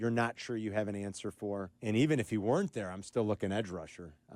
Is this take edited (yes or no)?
yes